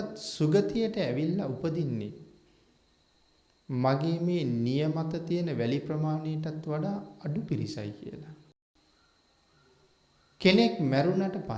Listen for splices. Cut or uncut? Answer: cut